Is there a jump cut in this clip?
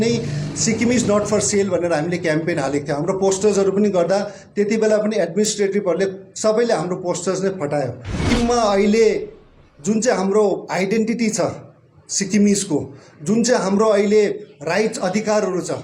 yes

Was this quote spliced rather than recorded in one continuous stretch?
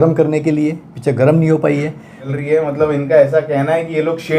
yes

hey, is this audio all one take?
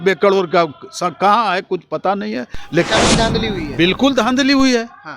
no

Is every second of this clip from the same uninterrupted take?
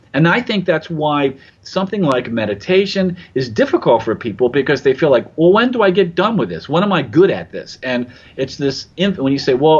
yes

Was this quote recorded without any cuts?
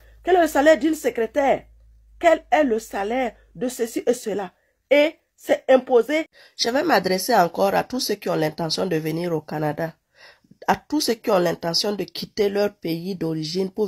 no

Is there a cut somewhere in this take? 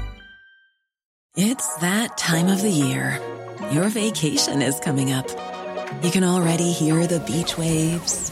yes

